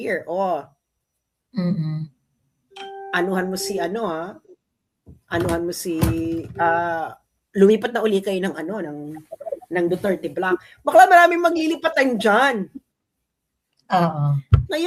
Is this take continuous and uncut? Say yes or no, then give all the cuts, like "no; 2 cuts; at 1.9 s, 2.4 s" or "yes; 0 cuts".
yes; 0 cuts